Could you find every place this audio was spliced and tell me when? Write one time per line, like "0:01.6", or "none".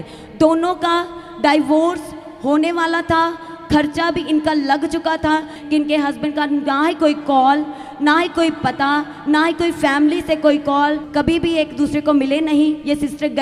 0:05.6
0:11.0